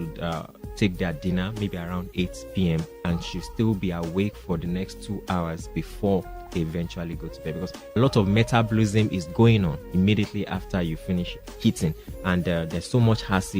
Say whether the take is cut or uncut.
cut